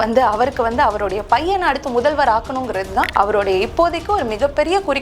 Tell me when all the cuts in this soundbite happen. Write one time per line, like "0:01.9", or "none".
0:03.1